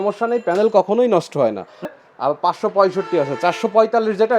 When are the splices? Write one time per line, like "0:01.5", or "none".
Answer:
0:01.8